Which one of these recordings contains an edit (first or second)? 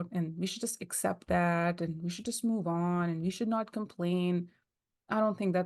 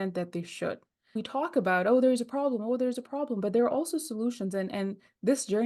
second